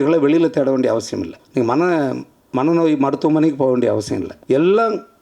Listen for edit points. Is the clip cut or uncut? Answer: cut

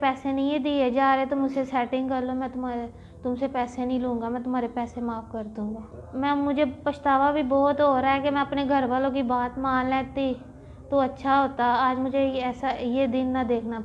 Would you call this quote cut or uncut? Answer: cut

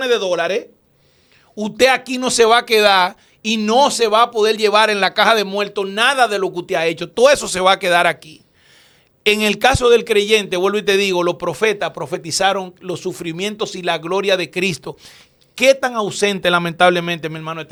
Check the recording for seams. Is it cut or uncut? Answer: uncut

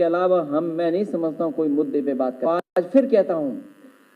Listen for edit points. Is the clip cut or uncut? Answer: cut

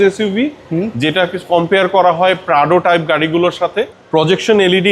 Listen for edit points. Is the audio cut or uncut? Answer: cut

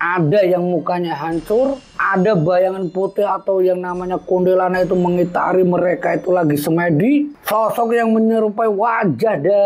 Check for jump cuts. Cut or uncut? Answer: cut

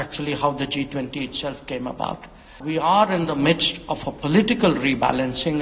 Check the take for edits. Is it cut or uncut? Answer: cut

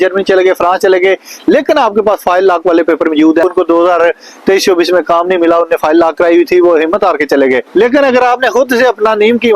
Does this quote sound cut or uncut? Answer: cut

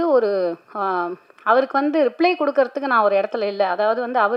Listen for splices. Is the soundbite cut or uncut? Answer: uncut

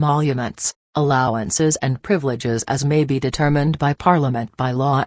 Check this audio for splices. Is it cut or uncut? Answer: cut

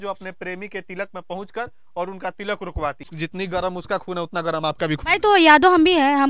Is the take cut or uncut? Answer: cut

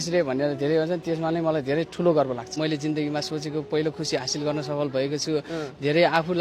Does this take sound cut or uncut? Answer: cut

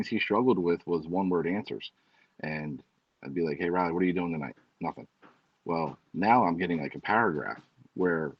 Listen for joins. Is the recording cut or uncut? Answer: uncut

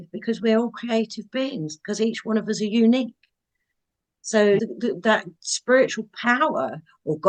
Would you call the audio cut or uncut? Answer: uncut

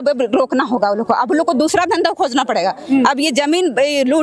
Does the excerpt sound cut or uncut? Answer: uncut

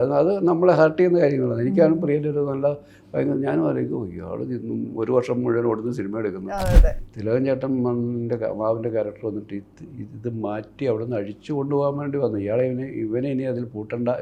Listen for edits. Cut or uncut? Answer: cut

